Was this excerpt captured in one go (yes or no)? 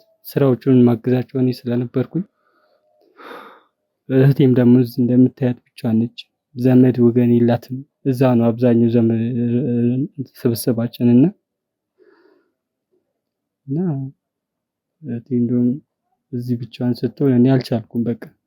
yes